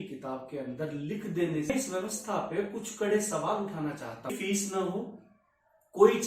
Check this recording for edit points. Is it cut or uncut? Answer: cut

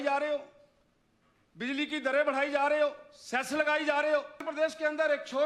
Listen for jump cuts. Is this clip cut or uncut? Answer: cut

